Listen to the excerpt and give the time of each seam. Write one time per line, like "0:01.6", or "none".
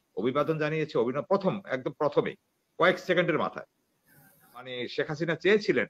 0:04.7